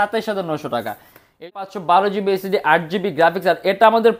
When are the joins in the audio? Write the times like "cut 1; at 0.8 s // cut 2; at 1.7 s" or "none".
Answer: cut 1; at 1.4 s